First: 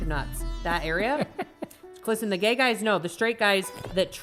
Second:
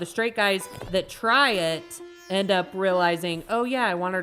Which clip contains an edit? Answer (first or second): first